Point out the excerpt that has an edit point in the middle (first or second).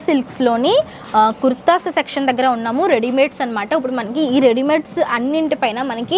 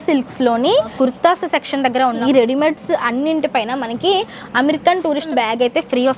second